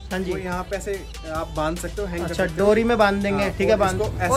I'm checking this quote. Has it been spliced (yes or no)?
no